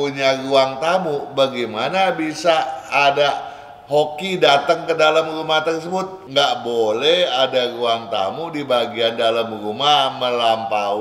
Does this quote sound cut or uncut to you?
cut